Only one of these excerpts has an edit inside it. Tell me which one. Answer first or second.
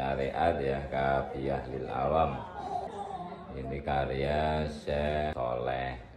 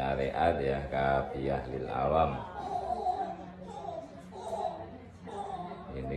first